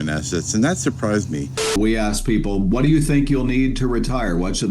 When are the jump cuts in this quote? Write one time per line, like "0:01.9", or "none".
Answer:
0:01.7